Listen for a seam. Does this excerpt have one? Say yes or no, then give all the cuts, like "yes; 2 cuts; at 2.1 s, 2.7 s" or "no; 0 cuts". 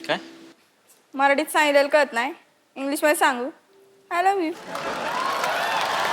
no; 0 cuts